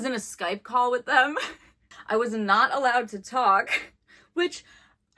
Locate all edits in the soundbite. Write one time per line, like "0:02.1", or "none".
none